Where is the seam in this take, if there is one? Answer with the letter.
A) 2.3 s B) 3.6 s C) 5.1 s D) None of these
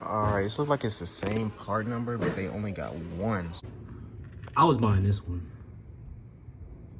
B